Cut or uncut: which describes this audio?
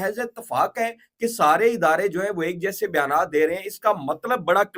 uncut